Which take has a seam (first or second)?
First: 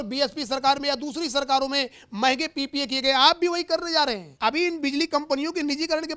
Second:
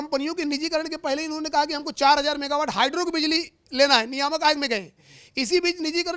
first